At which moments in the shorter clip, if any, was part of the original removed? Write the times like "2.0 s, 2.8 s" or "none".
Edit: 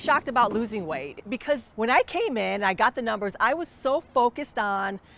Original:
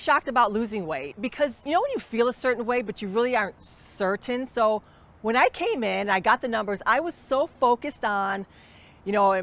1.3 s